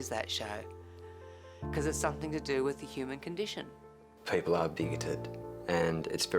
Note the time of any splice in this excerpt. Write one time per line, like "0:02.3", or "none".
0:01.0
0:03.7